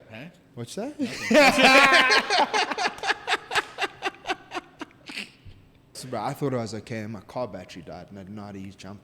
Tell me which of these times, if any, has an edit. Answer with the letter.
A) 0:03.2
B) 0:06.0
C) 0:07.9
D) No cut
B